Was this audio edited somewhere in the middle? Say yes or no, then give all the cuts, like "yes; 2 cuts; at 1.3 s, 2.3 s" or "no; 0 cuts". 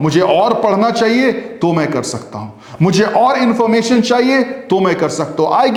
no; 0 cuts